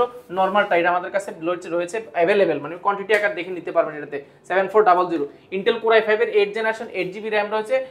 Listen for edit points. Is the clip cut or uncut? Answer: uncut